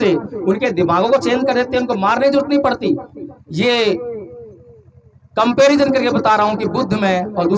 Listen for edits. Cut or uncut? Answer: uncut